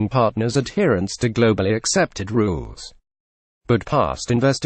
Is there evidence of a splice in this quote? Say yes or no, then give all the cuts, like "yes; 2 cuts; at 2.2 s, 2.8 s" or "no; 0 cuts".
yes; 1 cut; at 3.7 s